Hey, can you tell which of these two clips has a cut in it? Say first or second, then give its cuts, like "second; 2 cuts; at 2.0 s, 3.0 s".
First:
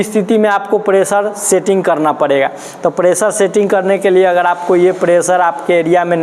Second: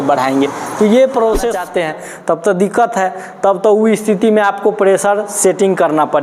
second; 1 cut; at 1.6 s